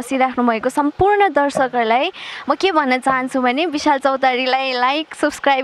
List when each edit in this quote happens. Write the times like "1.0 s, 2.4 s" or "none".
none